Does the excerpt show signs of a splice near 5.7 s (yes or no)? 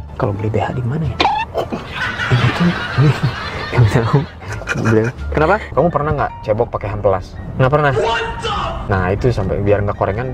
yes